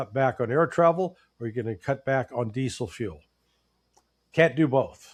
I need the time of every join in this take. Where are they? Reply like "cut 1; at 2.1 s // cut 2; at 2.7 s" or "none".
none